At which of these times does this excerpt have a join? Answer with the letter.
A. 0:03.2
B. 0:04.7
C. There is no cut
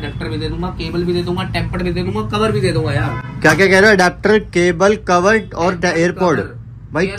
C